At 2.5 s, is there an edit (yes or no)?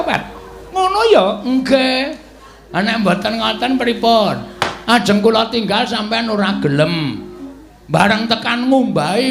no